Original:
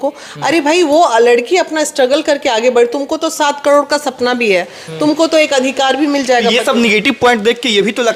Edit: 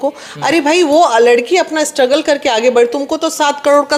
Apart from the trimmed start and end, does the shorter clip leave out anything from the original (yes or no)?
no